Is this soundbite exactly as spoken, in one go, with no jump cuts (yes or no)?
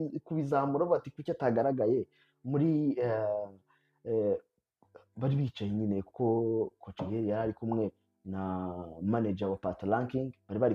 yes